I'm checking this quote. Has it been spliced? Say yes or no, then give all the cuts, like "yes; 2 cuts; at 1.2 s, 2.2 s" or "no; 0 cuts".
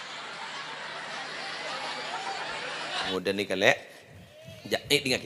yes; 1 cut; at 3.1 s